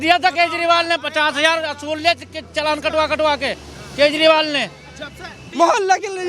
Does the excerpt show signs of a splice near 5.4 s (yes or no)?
yes